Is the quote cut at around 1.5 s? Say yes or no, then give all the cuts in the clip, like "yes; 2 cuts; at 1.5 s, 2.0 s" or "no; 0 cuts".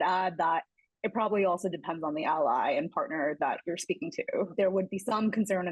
no; 1 cut; at 4.5 s